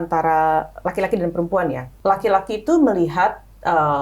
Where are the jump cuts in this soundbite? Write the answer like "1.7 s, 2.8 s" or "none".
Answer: 1.9 s